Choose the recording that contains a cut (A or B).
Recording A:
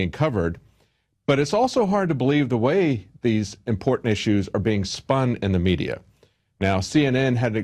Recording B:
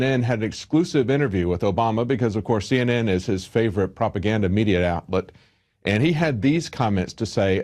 A